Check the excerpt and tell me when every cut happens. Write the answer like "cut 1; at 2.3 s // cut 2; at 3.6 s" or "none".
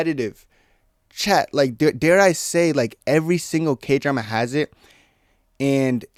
none